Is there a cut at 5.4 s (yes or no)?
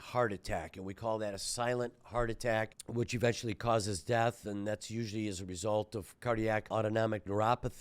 no